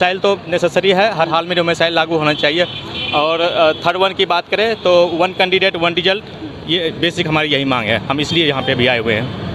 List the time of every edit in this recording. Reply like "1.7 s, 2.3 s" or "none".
none